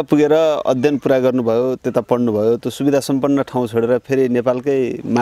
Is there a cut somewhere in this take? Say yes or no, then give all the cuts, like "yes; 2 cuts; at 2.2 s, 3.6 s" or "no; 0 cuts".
no; 0 cuts